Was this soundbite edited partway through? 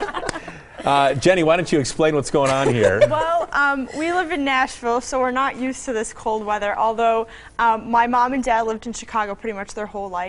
no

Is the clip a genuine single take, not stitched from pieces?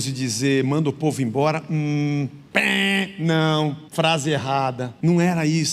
no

